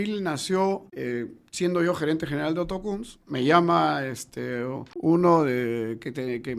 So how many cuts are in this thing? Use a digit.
2